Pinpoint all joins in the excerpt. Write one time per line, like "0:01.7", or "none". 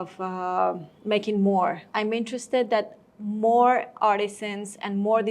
0:00.9
0:01.8